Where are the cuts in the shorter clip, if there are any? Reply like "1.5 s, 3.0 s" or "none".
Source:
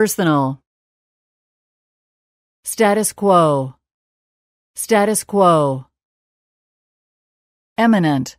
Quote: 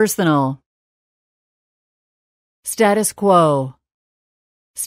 none

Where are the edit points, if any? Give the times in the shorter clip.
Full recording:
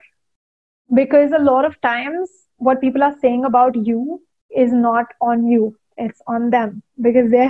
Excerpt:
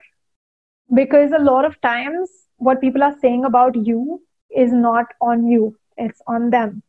none

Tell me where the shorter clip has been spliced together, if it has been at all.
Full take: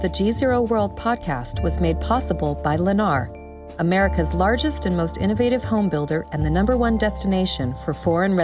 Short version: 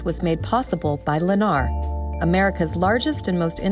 none

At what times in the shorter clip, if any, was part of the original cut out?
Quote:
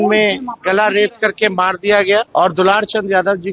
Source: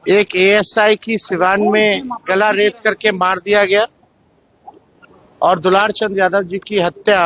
2.3 s

